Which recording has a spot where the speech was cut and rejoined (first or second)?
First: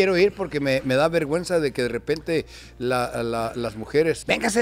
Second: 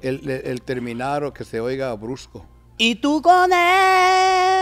second